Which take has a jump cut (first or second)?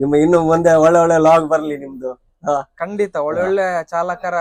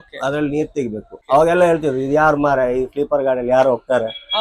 second